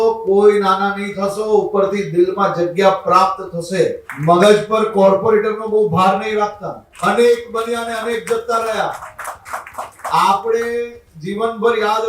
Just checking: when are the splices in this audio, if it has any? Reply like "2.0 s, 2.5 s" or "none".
4.1 s, 6.8 s